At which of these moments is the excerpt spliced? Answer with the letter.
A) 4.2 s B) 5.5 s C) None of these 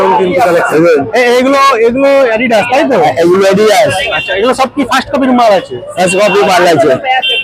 C